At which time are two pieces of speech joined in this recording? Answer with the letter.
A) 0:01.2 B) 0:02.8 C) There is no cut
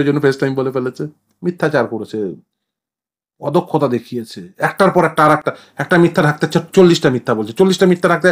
A